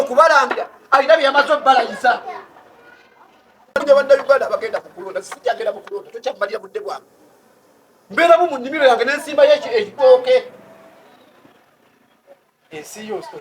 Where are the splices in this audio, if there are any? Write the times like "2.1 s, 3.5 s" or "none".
3.8 s